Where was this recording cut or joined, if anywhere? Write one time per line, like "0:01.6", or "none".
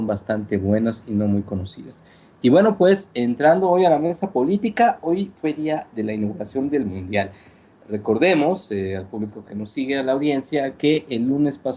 0:06.6